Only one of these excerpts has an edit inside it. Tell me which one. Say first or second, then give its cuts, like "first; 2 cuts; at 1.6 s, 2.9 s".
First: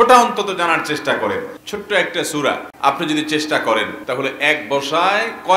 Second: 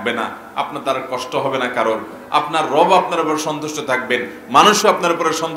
first; 3 cuts; at 1.6 s, 2.7 s, 4.0 s